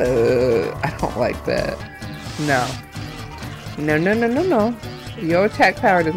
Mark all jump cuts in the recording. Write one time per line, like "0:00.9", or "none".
0:01.8